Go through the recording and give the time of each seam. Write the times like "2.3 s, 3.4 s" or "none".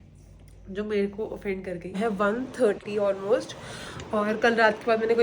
2.0 s